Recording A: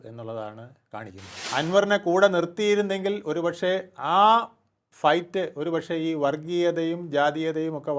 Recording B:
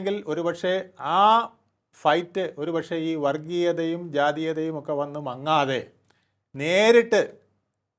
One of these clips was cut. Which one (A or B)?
A